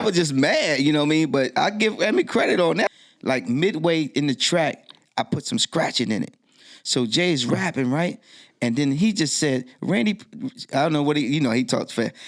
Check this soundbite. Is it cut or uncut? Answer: cut